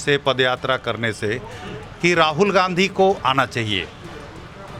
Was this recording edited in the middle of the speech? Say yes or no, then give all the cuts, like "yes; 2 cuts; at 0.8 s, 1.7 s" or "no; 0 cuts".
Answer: no; 0 cuts